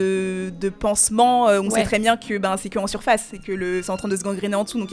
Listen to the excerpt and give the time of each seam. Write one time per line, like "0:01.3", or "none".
none

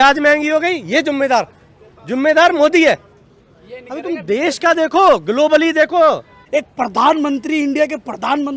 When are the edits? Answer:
0:06.3

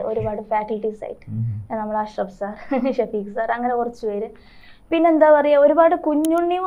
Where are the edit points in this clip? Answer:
none

